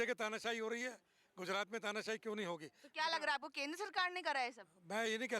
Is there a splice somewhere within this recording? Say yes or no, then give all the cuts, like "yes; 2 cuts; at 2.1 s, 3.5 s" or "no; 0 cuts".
no; 0 cuts